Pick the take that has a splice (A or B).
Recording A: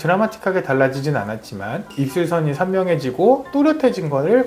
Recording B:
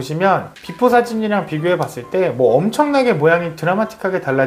A